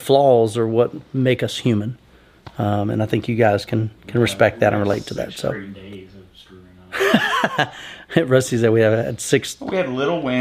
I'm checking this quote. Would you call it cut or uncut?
uncut